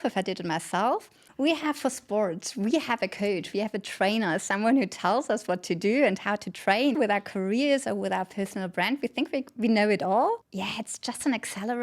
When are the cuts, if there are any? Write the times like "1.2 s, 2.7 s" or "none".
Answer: 1.2 s, 7.0 s, 10.5 s